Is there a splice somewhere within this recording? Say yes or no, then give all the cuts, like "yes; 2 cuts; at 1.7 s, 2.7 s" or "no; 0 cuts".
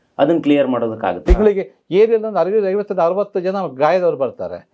yes; 1 cut; at 1.2 s